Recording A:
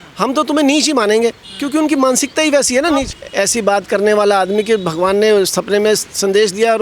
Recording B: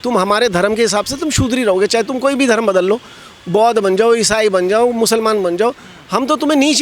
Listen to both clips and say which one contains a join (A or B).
A